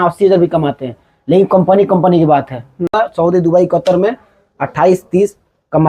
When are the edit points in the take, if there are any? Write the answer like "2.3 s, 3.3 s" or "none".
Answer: 2.9 s